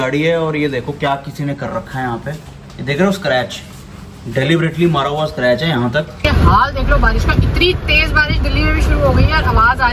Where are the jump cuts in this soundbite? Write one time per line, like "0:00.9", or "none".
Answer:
0:06.2